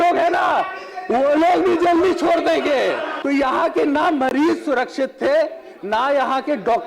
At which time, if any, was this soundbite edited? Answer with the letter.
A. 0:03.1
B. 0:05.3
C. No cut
A